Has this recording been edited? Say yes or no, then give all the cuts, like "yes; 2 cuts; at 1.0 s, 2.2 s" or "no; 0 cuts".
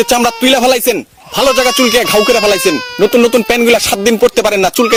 no; 0 cuts